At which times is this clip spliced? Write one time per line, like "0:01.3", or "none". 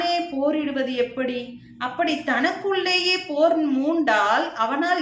none